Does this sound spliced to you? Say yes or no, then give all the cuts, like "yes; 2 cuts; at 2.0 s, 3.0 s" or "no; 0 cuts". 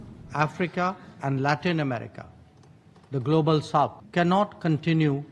yes; 1 cut; at 4.0 s